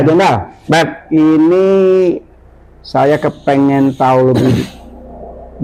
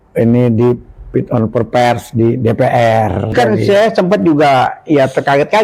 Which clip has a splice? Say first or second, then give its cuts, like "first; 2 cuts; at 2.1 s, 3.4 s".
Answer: second; 1 cut; at 3.3 s